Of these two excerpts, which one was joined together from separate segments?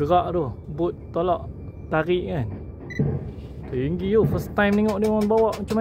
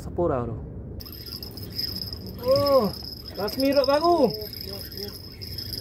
second; 1 cut; at 1.0 s

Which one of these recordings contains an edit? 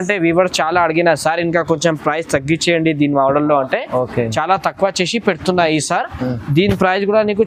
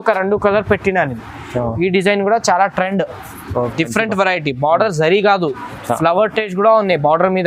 second; 1 cut; at 3.7 s

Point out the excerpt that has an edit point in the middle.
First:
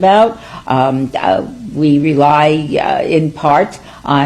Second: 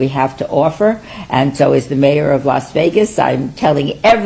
second; 1 cut; at 1.1 s

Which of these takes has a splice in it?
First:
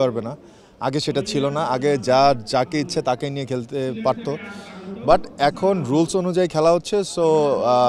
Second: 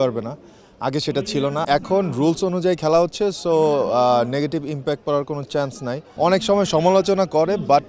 second; 2 cuts; at 1.6 s, 6.0 s

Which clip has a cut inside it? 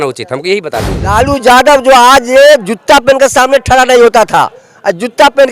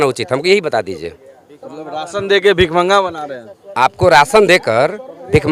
first; 1 cut; at 1.1 s

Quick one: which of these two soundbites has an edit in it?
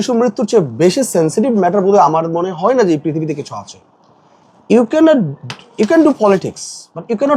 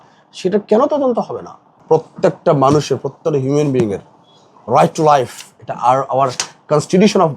second; 1 cut; at 1.7 s

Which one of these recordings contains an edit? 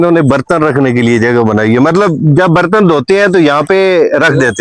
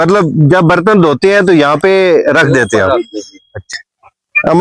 second; 1 cut; at 3.7 s

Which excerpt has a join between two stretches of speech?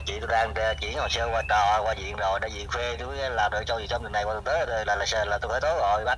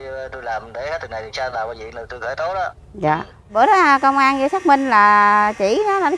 second; 1 cut; at 3.6 s

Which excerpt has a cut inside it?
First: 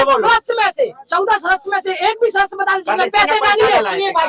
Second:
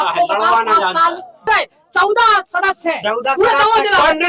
second; 1 cut; at 1.5 s

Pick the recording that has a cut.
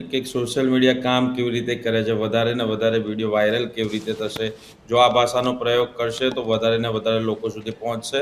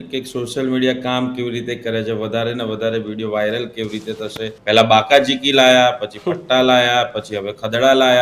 second; 1 cut; at 4.5 s

